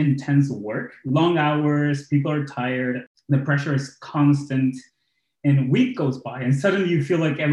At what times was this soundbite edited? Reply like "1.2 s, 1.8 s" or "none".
3.1 s